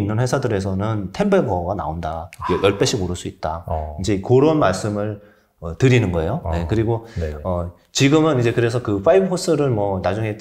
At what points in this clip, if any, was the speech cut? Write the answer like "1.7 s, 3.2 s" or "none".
none